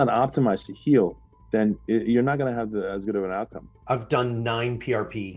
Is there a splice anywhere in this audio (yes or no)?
no